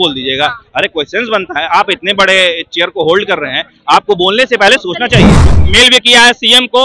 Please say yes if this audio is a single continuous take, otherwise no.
no